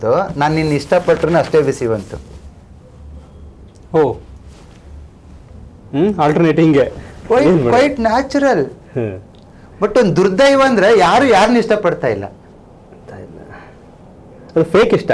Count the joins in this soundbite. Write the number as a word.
zero